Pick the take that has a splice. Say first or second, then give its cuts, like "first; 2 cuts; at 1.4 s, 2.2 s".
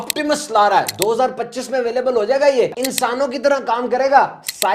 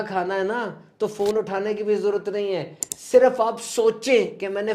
first; 1 cut; at 2.8 s